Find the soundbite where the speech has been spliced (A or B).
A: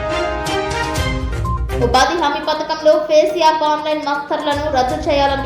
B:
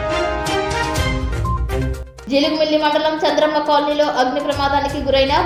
A